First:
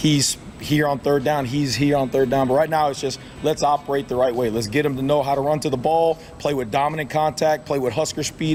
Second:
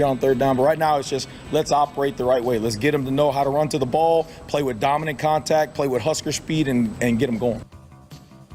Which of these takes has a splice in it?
second; 1 cut; at 7.7 s

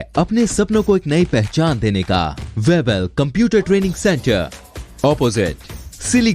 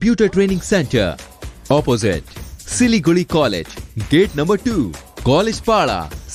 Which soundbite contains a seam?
first; 1 cut; at 2.4 s

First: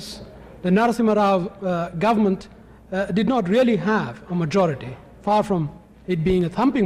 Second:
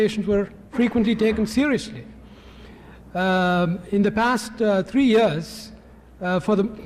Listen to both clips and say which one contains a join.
second; 1 cut; at 5.7 s

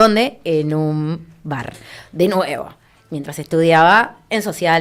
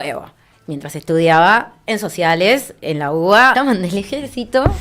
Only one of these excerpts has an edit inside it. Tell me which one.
second; 1 cut; at 3.5 s

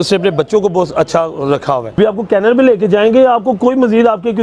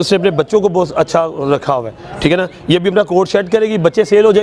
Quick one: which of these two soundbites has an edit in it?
first; 1 cut; at 2.0 s

